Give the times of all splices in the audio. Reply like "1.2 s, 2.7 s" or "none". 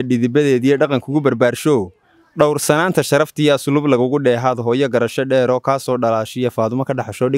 none